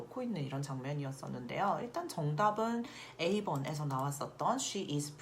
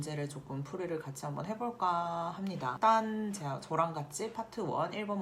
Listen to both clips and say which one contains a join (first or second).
second